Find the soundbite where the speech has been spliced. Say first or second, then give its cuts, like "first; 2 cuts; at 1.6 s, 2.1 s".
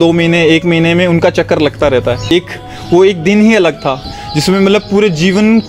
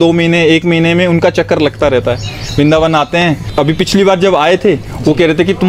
first; 1 cut; at 2.3 s